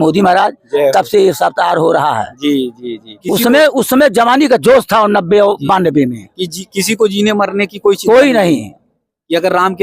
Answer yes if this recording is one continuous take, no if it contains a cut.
no